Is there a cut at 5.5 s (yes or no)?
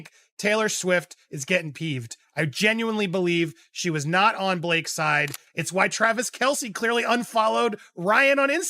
yes